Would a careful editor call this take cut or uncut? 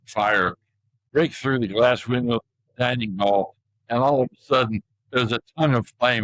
cut